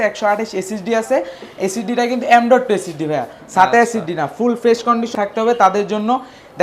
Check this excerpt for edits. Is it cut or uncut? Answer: cut